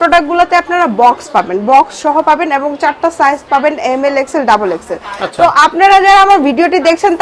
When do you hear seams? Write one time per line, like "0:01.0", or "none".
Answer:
none